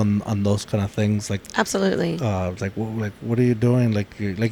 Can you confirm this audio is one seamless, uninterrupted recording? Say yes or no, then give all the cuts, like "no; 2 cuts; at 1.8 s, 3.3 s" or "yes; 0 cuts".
yes; 0 cuts